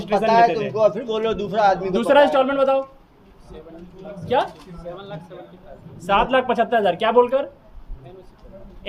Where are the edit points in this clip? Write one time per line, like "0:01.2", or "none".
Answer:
none

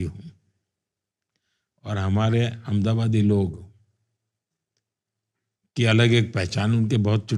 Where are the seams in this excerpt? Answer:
none

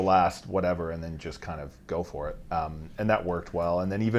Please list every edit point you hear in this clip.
none

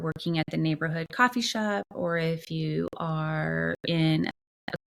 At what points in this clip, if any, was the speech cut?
none

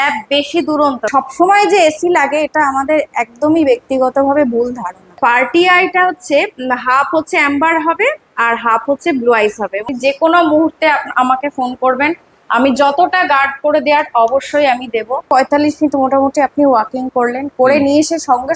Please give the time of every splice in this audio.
0:01.1
0:05.2
0:09.8
0:15.2

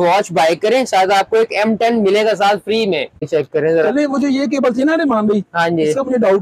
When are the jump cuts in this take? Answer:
0:03.3

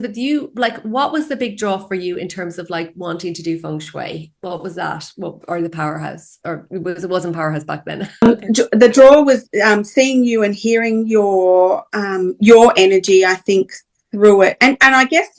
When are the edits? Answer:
0:08.3

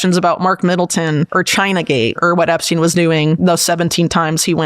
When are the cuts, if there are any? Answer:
0:01.3
0:02.2
0:03.4

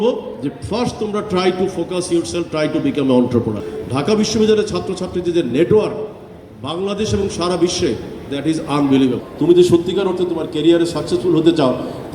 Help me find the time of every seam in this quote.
0:03.7
0:09.3

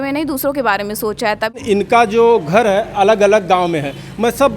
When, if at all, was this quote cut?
0:01.6

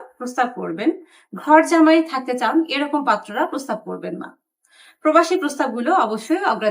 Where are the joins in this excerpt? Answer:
none

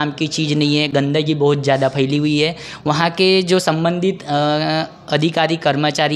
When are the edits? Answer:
none

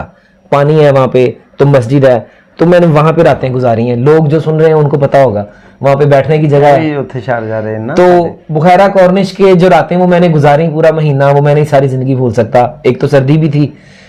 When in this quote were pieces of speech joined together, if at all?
none

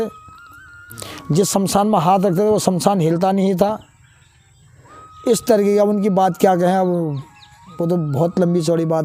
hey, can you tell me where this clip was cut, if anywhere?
none

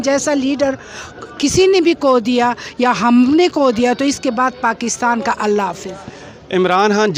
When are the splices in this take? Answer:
none

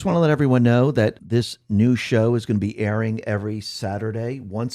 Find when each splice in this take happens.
0:01.2

